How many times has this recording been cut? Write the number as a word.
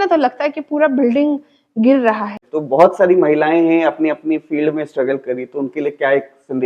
one